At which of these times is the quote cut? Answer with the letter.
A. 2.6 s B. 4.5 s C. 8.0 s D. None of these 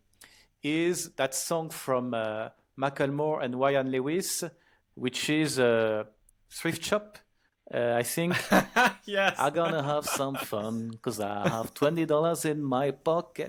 D